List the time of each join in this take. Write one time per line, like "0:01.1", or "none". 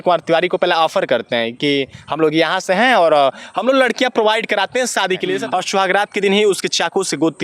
0:05.4